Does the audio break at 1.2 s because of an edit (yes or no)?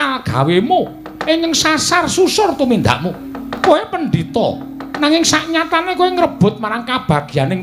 no